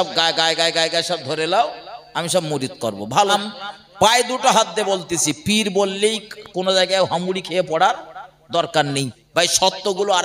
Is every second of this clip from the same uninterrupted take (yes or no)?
no